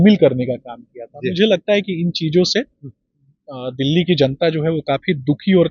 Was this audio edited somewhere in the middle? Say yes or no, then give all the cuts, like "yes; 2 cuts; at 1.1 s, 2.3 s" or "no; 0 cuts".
no; 0 cuts